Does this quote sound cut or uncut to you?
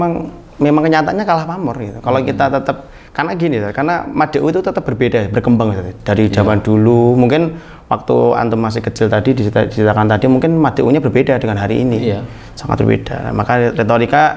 uncut